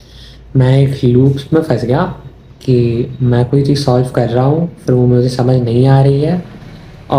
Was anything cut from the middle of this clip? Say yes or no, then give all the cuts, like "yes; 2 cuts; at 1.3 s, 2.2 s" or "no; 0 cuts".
no; 0 cuts